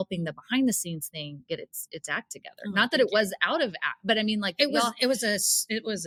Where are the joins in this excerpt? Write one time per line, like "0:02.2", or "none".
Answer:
none